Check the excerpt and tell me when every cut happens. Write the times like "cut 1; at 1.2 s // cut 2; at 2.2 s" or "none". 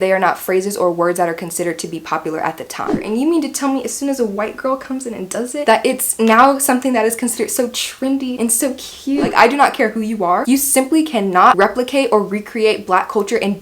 cut 1; at 3.0 s // cut 2; at 9.3 s